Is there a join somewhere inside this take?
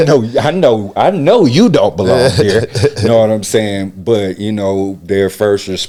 no; 0 cuts

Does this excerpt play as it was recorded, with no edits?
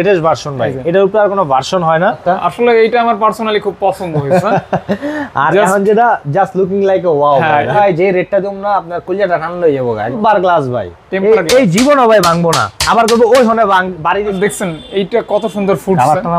no; 4 cuts; at 2.2 s, 7.8 s, 10.2 s, 14.3 s

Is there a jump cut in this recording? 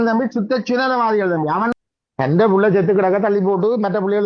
yes; 1 cut; at 1.7 s

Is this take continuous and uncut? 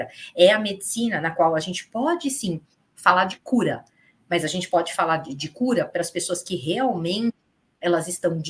yes; 0 cuts

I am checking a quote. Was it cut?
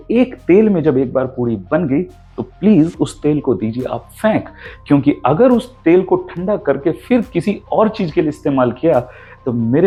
no; 0 cuts

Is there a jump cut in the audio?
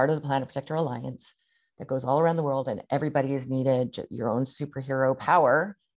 no; 0 cuts

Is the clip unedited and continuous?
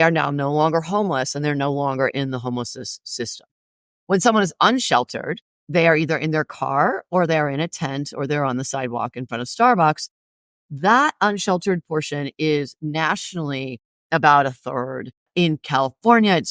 no; 1 cut; at 15.3 s

